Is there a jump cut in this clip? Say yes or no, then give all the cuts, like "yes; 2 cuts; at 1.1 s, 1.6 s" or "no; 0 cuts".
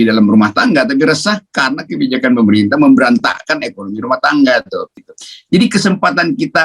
yes; 1 cut; at 5.1 s